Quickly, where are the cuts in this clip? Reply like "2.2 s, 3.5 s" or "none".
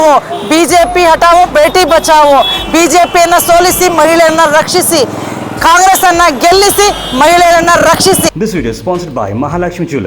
8.2 s